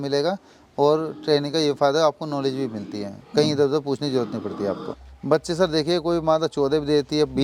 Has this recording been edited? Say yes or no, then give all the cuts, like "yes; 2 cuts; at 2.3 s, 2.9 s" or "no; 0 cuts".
yes; 1 cut; at 4.9 s